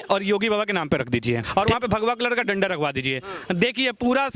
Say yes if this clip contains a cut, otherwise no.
yes